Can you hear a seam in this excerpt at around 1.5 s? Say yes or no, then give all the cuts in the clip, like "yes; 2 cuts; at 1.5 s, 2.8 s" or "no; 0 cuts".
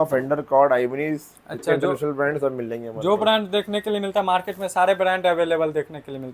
no; 0 cuts